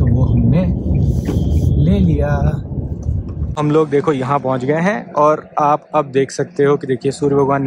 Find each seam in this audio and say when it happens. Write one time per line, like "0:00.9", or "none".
0:03.3